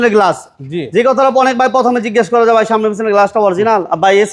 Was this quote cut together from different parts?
no; 0 cuts

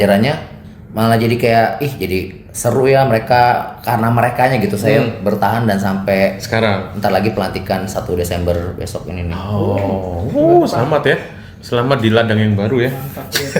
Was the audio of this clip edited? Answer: no; 0 cuts

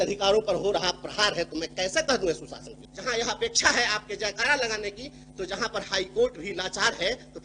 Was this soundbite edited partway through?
yes; 1 cut; at 2.8 s

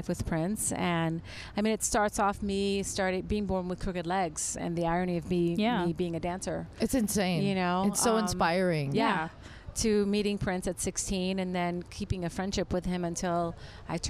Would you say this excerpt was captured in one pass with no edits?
yes; 0 cuts

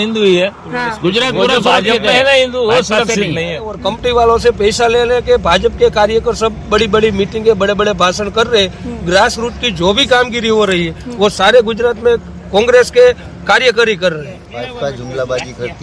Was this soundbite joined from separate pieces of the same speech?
yes; 2 cuts; at 3.8 s, 14.4 s

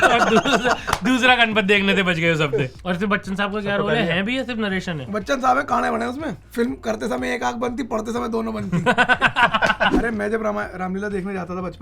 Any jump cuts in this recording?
yes; 3 cuts; at 2.8 s, 6.4 s, 9.9 s

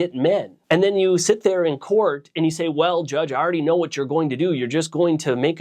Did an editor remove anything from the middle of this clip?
no; 0 cuts

